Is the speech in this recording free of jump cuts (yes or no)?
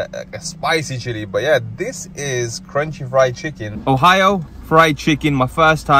no